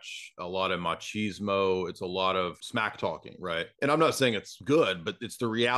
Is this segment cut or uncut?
cut